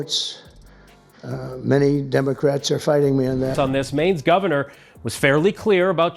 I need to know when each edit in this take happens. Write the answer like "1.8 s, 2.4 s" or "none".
3.5 s